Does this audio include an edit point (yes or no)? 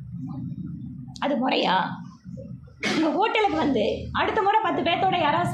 no